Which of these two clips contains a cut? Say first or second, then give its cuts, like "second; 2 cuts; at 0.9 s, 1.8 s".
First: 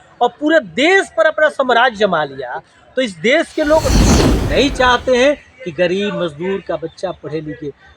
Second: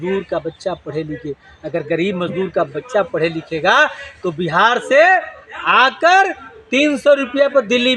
first; 1 cut; at 4.1 s